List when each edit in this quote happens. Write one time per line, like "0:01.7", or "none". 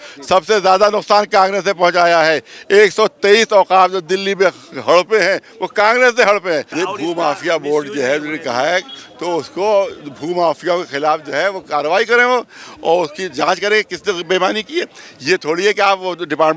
0:06.7